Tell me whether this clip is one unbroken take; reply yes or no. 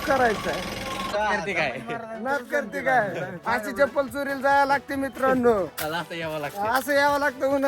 no